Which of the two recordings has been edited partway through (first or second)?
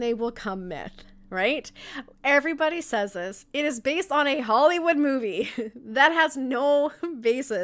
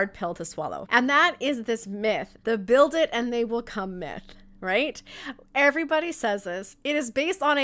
second